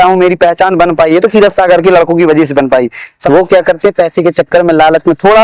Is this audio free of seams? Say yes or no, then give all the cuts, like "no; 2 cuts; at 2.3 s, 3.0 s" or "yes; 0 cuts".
no; 1 cut; at 3.1 s